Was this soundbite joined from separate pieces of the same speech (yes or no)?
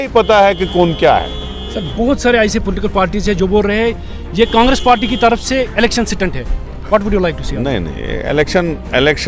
no